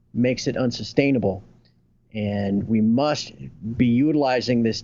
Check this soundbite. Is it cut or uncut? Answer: uncut